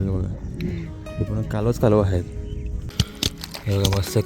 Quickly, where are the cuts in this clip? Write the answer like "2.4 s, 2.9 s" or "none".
2.9 s